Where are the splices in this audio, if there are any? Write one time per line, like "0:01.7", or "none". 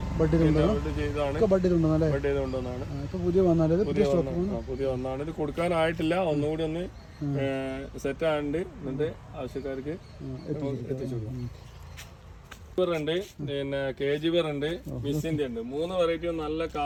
none